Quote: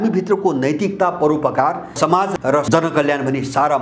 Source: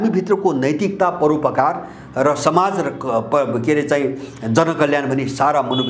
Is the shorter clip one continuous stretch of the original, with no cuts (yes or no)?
no